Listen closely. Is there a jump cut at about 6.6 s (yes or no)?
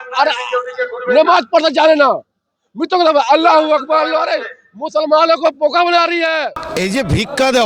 yes